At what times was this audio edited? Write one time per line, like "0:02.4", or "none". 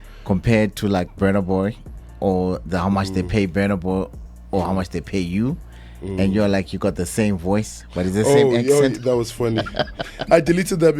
none